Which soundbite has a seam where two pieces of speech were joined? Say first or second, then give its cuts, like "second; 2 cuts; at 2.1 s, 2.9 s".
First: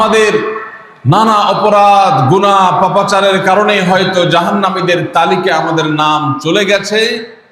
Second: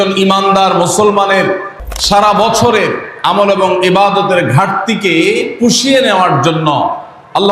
second; 1 cut; at 1.7 s